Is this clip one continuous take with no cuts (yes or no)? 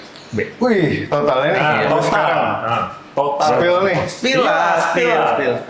yes